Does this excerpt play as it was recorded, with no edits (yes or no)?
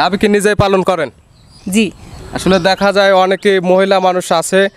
yes